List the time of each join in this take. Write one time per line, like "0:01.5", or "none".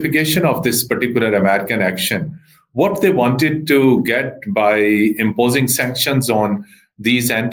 none